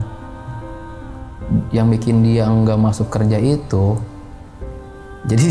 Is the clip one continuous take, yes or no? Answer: yes